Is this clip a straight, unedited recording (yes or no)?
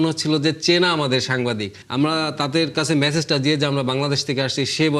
no